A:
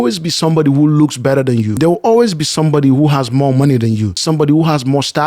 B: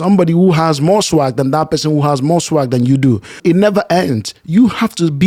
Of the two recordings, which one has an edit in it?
A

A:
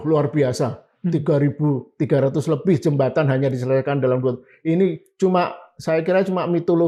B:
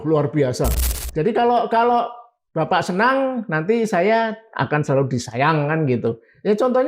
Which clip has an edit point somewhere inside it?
B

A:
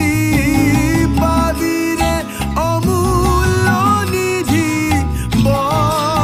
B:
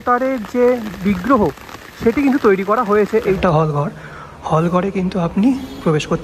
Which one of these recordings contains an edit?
B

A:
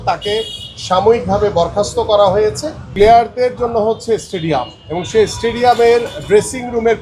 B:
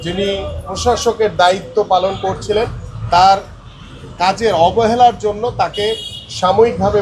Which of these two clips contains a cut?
A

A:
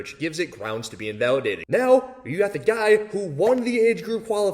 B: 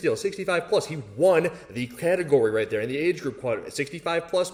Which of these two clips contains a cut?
A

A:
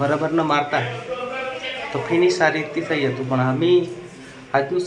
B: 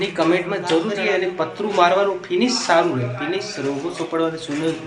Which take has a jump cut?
B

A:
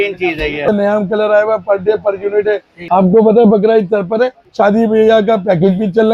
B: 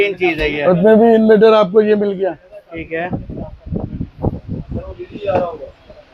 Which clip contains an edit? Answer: A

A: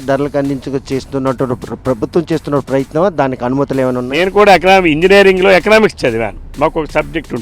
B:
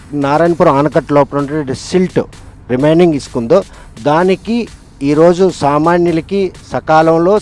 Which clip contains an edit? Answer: A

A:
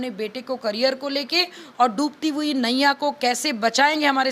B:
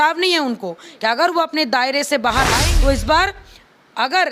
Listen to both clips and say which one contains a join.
B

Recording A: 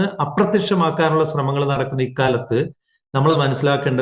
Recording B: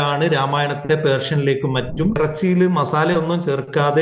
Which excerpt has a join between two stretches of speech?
B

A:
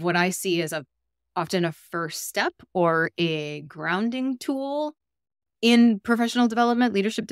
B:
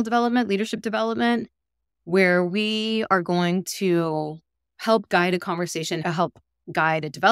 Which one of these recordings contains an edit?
B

